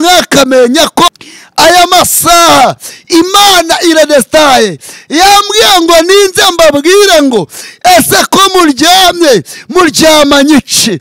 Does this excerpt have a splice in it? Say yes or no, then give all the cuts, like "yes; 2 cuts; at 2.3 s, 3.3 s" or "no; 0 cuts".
yes; 1 cut; at 1.1 s